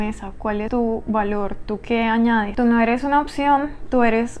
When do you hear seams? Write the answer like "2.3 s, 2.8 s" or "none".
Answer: 2.5 s